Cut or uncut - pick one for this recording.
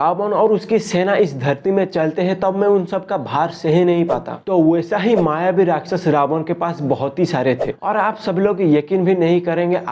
cut